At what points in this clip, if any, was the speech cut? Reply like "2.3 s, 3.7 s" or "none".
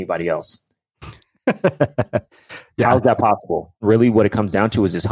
3.8 s